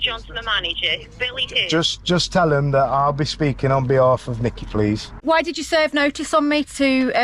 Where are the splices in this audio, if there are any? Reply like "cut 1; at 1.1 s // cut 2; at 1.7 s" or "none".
cut 1; at 5.2 s